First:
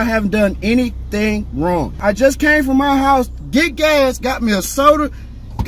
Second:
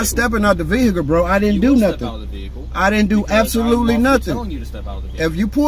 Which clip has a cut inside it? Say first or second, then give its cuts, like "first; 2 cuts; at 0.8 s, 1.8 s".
first; 1 cut; at 2.0 s